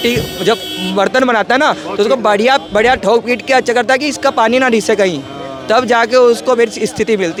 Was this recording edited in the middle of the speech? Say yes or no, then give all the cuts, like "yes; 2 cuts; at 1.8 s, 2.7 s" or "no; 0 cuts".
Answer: no; 0 cuts